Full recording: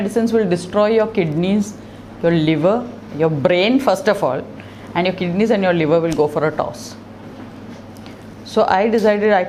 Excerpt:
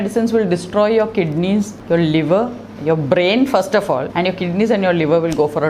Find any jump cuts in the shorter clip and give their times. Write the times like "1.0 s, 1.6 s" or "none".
1.8 s, 4.1 s

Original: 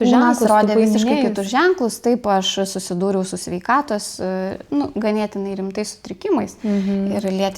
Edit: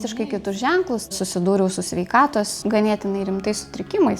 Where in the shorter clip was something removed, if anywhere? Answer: 1.1 s, 2.6 s

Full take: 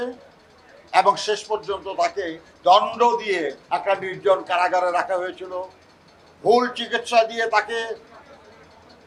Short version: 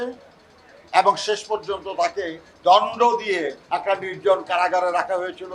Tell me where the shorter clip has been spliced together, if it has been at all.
none

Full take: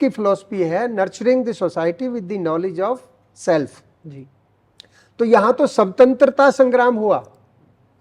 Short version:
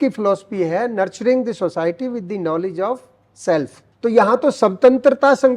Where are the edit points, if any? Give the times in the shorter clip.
3.8 s

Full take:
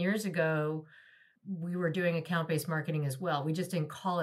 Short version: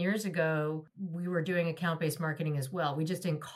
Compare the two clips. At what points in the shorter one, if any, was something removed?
1.0 s

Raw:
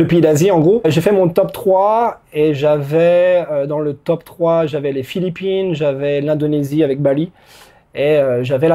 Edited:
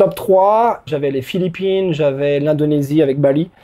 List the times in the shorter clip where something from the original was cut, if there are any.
0.9 s

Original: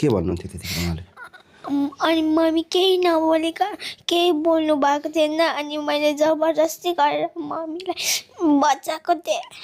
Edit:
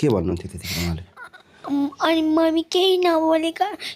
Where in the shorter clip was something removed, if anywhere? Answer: none

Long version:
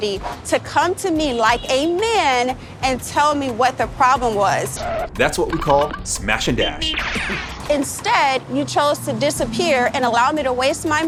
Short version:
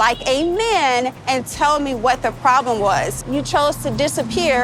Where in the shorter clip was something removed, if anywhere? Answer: 1.2 s, 3.2 s

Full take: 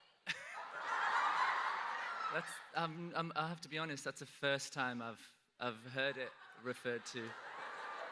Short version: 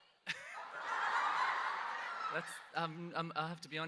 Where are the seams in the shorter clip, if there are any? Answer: none

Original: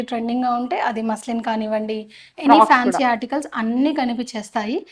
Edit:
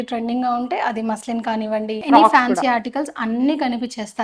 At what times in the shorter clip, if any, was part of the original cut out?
2.0 s

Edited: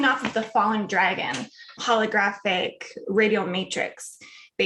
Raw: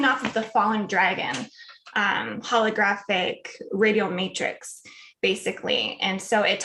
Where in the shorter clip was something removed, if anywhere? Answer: 1.7 s

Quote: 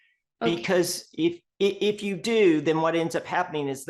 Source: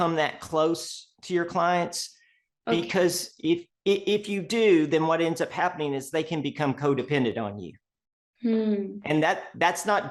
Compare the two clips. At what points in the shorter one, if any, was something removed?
none

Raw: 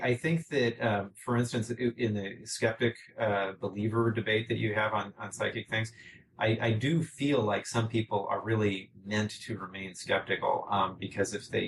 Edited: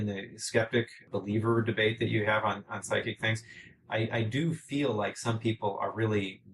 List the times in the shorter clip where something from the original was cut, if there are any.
1.0 s

